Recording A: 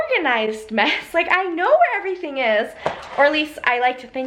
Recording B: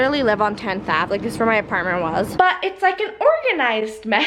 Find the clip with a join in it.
B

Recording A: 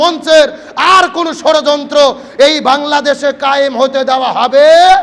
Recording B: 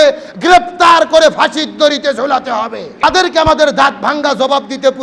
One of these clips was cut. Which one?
B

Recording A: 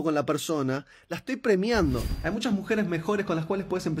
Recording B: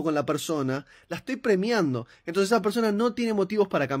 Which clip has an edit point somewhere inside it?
A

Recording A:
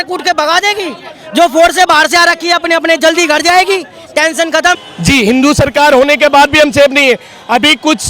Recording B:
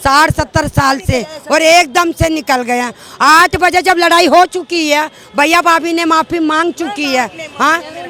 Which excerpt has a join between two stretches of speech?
A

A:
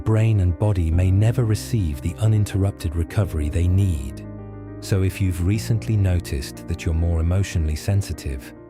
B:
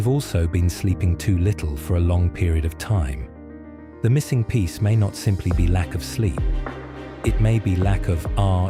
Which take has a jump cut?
A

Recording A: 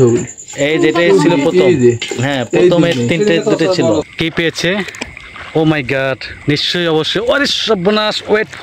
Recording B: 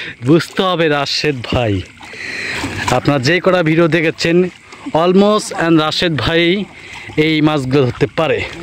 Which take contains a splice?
A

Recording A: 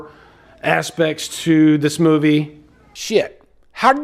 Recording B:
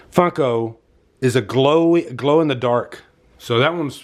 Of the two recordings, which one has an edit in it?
A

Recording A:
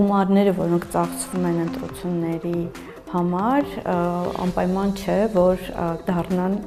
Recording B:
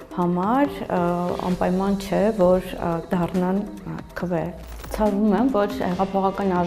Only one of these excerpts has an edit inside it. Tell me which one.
B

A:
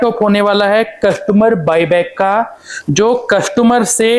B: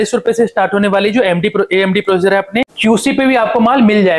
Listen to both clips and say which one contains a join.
B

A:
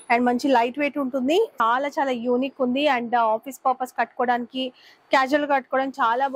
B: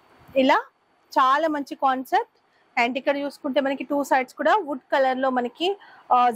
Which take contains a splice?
A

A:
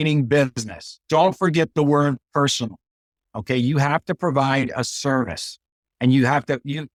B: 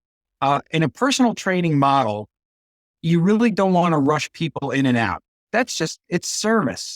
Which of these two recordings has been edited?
B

